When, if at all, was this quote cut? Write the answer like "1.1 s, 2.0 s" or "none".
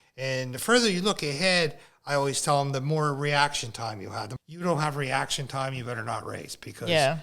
4.3 s